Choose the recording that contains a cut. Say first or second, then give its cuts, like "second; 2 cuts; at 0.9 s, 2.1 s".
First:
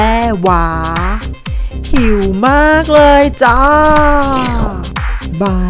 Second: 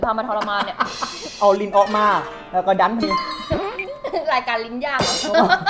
second; 1 cut; at 1.3 s